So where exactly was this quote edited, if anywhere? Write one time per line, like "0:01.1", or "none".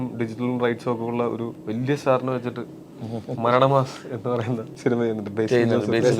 0:01.6
0:04.7